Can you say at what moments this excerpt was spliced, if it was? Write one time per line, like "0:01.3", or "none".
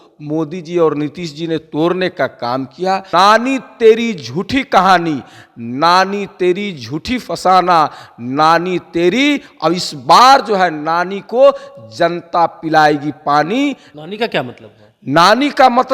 0:03.1
0:13.9